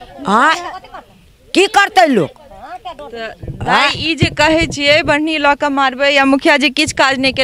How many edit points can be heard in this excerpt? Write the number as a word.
zero